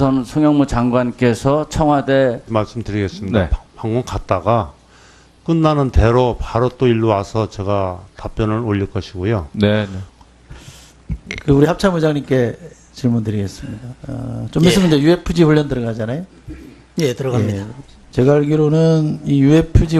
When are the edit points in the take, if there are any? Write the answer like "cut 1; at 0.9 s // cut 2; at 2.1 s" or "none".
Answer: none